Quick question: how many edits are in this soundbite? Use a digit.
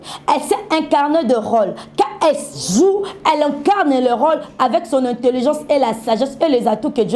0